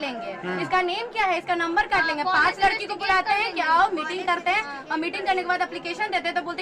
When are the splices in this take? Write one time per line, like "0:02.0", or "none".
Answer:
none